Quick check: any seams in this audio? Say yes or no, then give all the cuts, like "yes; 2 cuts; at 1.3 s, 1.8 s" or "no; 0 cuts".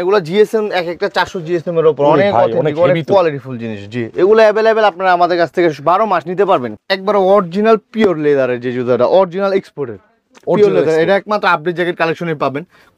yes; 1 cut; at 6.7 s